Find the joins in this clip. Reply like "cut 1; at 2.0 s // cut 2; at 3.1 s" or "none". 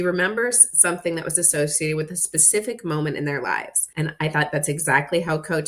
cut 1; at 3.8 s